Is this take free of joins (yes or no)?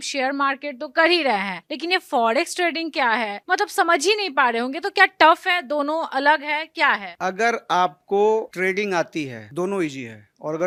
yes